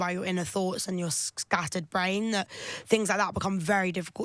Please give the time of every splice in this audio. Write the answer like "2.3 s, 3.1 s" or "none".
none